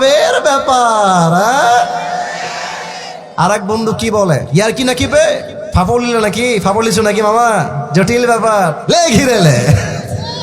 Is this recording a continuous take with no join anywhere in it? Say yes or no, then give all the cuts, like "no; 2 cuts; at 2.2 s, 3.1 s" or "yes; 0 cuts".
no; 3 cuts; at 4.4 s, 5.6 s, 8.8 s